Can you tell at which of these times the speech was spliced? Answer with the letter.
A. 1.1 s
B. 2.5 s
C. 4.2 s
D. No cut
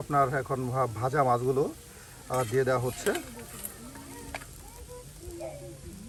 D